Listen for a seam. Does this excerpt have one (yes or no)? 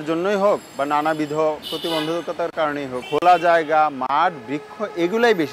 yes